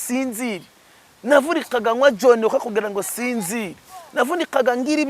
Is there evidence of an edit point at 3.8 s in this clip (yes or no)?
no